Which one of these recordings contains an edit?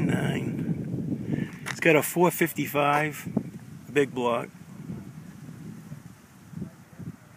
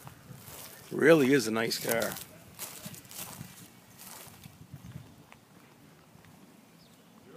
first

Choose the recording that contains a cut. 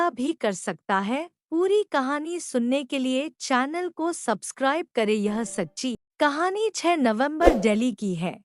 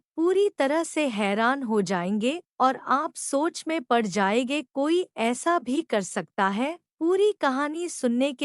first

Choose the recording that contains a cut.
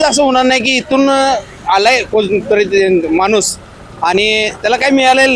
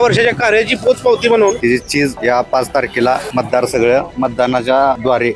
second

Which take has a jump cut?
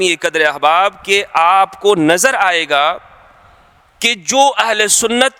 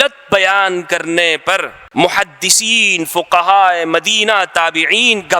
second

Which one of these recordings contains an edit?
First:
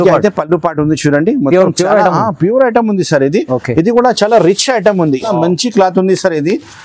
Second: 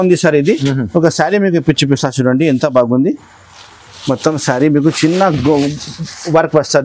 first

